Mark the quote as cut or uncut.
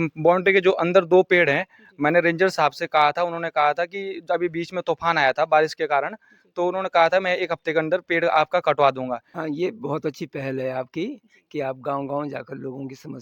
cut